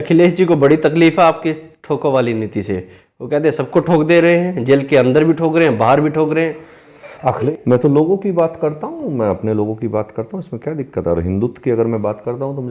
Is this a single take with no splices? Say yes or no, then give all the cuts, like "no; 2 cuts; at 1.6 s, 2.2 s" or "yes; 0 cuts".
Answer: no; 1 cut; at 7.5 s